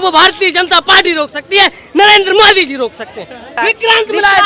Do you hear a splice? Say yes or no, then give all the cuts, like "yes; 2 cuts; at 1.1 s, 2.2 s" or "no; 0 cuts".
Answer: yes; 1 cut; at 3.5 s